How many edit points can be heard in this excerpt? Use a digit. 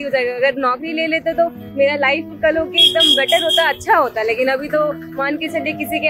0